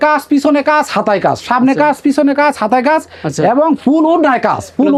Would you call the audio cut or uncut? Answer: uncut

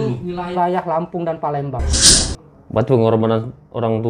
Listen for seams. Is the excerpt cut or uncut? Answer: cut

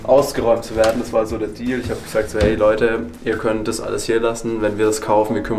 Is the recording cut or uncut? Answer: uncut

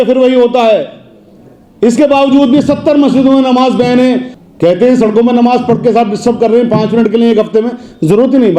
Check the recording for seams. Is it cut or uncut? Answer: cut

